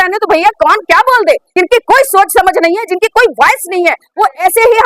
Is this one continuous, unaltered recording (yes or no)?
no